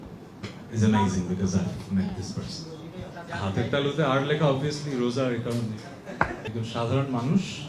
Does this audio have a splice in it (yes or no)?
yes